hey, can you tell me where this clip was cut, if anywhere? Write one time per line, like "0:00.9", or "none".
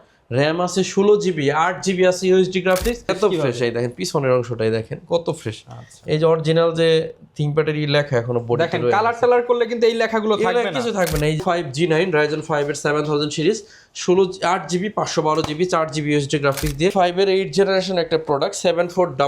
0:03.1
0:11.4
0:16.9